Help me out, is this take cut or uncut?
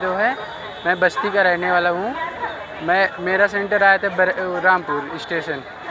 uncut